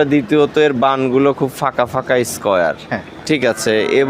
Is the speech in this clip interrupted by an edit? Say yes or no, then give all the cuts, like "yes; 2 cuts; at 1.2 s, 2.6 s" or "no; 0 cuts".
no; 0 cuts